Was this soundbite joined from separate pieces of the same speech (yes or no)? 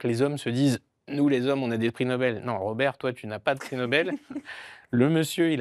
no